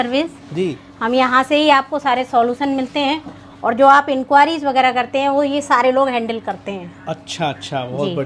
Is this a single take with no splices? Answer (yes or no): yes